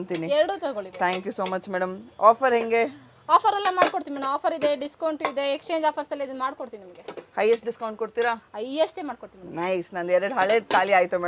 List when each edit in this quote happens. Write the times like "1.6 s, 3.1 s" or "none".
none